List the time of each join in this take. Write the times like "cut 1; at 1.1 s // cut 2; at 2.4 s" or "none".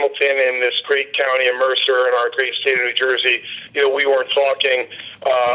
cut 1; at 2.2 s